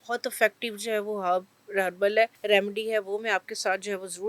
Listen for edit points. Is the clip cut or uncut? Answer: cut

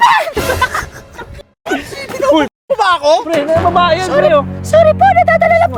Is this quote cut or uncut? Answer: uncut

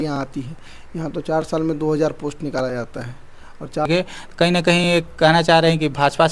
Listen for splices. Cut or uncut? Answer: cut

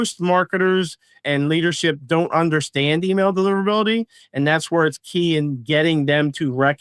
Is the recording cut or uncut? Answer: cut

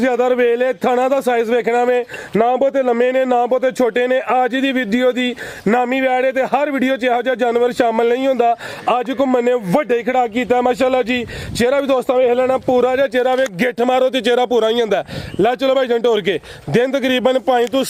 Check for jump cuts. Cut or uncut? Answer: uncut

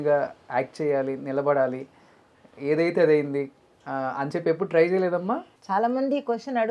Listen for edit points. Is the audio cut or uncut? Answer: uncut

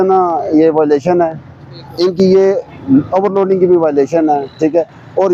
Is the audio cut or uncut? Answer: uncut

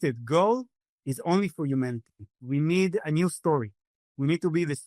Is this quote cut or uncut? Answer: cut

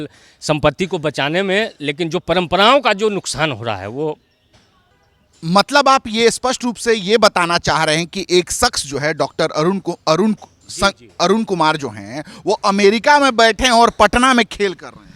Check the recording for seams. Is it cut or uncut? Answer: uncut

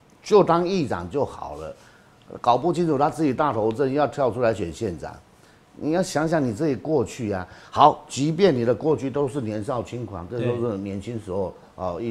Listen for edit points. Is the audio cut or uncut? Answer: uncut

